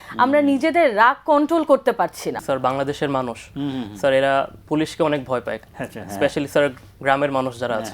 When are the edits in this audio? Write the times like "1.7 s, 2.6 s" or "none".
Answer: 2.4 s